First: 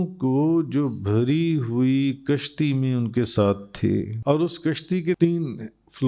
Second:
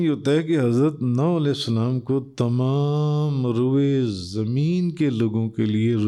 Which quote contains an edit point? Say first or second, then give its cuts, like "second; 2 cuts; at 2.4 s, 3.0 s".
first; 2 cuts; at 4.1 s, 5.2 s